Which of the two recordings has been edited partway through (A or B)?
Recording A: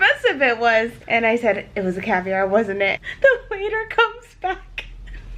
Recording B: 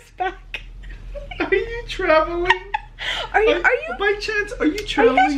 A